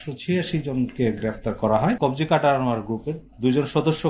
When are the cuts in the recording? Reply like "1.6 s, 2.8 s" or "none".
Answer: 2.0 s